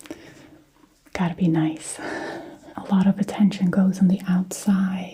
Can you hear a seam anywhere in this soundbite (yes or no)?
yes